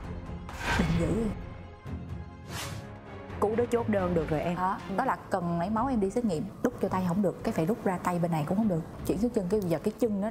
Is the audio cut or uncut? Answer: cut